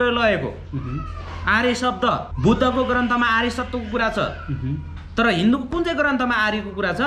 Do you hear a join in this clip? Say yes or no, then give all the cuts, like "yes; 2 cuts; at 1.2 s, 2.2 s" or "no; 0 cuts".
yes; 1 cut; at 2.3 s